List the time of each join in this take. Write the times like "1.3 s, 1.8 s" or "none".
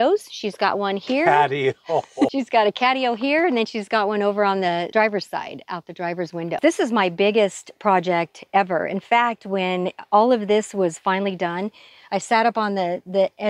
2.3 s, 4.9 s, 6.6 s